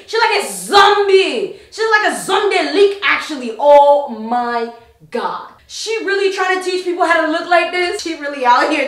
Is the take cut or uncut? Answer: uncut